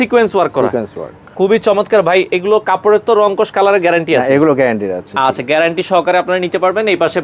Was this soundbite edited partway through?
no; 0 cuts

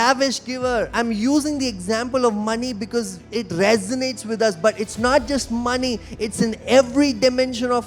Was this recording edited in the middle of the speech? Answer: yes; 1 cut; at 0.9 s

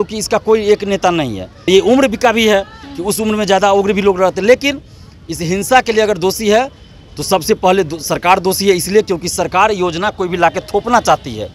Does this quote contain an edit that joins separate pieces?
yes; 1 cut; at 1.5 s

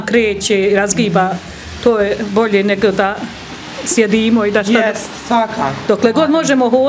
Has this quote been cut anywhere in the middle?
no; 0 cuts

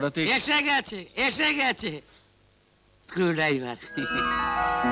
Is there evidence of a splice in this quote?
no; 0 cuts

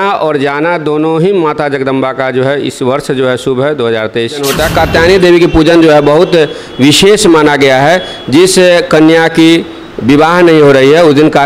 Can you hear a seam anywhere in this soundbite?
yes; 1 cut; at 4.6 s

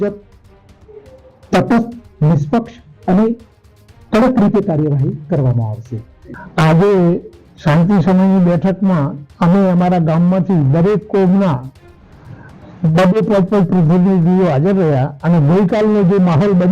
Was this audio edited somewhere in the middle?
no; 0 cuts

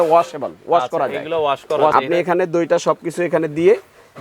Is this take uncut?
no; 1 cut; at 1.9 s

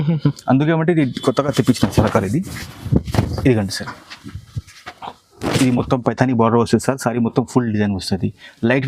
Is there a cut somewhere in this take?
no; 0 cuts

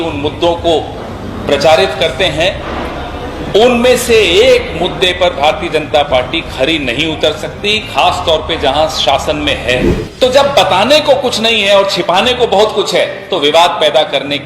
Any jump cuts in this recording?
yes; 1 cut; at 10.0 s

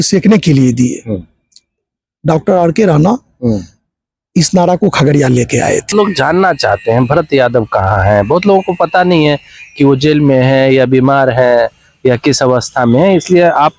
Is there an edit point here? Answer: yes; 1 cut; at 5.9 s

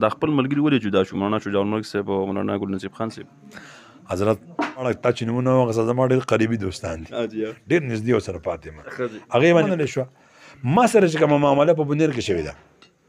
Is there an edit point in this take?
yes; 2 cuts; at 4.9 s, 9.6 s

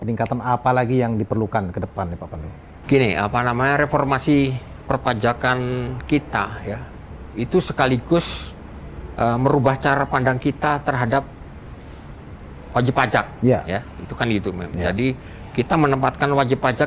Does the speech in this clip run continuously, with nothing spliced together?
yes; 0 cuts

